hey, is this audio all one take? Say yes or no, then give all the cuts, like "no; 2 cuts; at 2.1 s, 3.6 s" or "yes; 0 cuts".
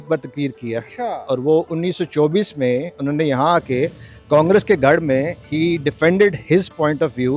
yes; 0 cuts